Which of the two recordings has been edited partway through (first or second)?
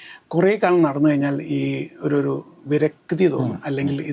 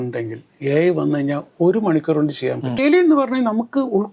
second